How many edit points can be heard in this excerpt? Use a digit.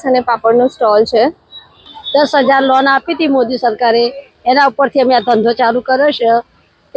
0